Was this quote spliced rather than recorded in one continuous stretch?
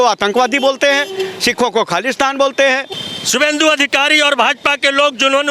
yes; 1 cut; at 2.9 s

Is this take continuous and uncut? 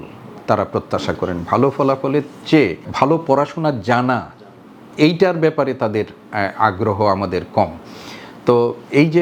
yes; 0 cuts

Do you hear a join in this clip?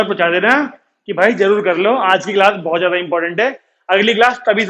no; 0 cuts

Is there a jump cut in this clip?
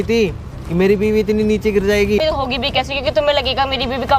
yes; 1 cut; at 2.2 s

